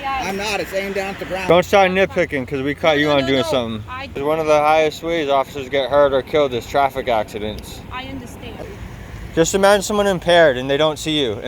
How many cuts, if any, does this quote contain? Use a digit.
3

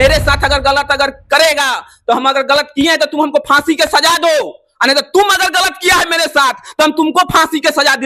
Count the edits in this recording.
0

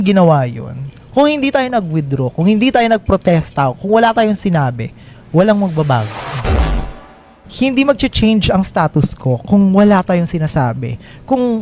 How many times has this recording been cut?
1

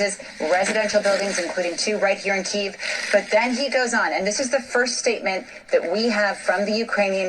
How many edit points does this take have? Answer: 1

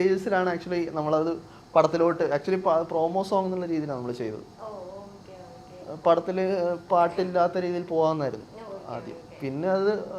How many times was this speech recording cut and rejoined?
0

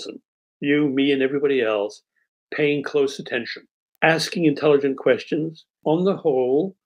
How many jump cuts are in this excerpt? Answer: 2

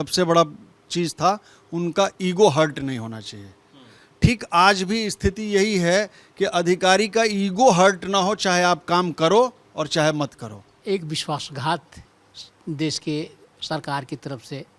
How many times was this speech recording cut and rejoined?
1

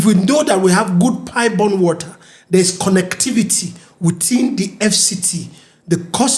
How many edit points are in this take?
0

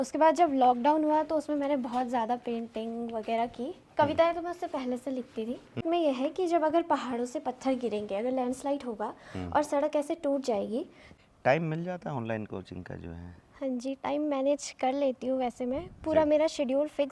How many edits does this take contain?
2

